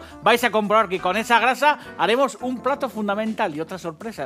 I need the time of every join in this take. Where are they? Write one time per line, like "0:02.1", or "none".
none